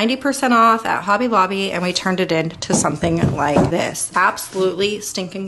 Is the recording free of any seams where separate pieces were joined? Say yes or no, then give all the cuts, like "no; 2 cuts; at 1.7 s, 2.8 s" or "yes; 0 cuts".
no; 1 cut; at 3.8 s